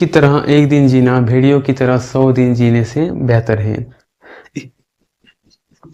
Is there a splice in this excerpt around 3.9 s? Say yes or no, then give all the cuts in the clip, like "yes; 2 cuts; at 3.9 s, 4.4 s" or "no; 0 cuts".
yes; 1 cut; at 3.9 s